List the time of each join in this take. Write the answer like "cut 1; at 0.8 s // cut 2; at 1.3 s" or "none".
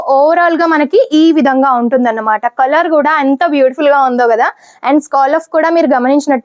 none